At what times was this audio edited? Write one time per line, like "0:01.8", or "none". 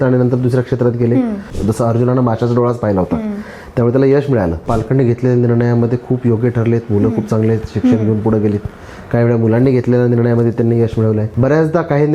0:01.5
0:04.6
0:11.3